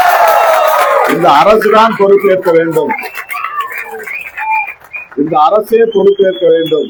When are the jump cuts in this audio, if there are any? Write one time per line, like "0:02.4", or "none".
none